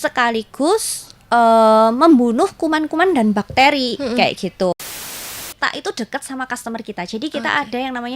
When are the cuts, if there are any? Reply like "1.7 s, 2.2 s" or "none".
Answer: 4.9 s